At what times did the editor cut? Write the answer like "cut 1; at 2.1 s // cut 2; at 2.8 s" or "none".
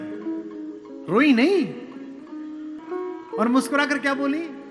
cut 1; at 2.8 s